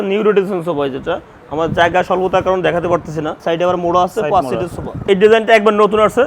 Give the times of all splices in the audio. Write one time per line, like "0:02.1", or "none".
0:03.4
0:05.0

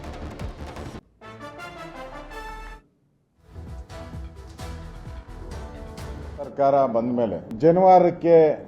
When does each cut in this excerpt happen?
0:00.9

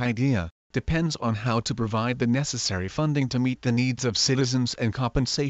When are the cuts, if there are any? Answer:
none

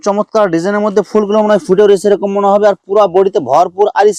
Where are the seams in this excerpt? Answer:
none

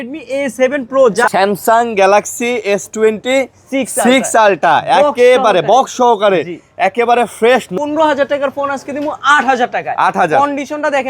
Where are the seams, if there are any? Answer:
0:01.3
0:07.7

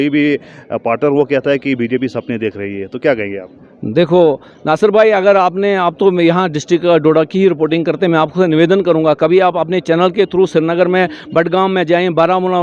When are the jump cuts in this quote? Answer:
none

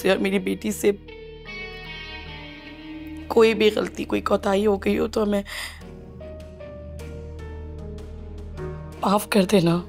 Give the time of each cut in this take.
0:08.9

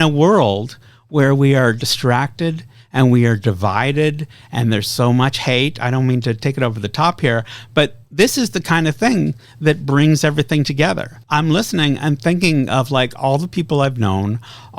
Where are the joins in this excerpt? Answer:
0:11.1

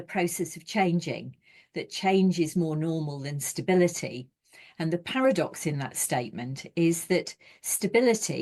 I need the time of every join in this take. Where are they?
none

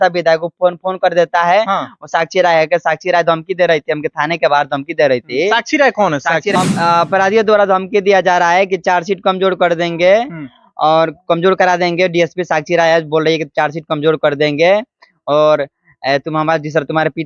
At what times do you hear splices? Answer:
0:06.5

